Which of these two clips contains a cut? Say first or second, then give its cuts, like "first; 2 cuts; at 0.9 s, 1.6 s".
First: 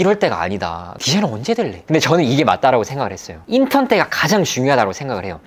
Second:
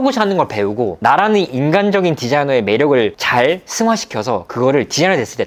first; 3 cuts; at 0.9 s, 1.8 s, 3.3 s